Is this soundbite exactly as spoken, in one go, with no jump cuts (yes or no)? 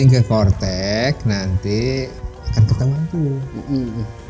yes